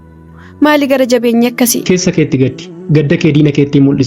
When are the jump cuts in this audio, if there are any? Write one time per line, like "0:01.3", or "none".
0:01.8